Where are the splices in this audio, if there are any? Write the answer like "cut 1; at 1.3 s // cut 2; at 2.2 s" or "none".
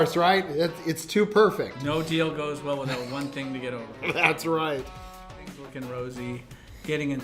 cut 1; at 5.4 s